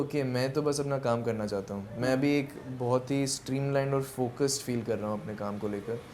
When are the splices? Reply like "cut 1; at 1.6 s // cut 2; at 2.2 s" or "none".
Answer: none